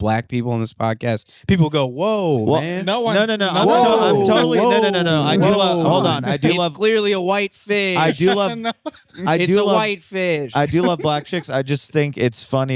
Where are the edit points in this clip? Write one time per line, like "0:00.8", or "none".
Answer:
none